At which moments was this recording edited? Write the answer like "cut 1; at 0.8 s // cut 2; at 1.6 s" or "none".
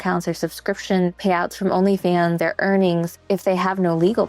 cut 1; at 1.2 s // cut 2; at 2.4 s // cut 3; at 3.3 s